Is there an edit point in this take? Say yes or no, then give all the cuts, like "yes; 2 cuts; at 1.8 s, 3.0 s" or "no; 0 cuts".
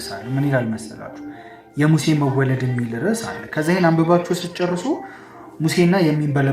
no; 0 cuts